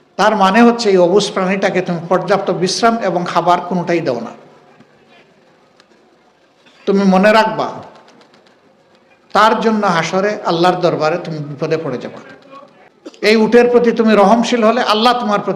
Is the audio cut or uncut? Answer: cut